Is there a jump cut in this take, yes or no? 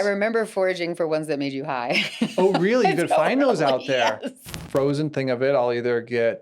yes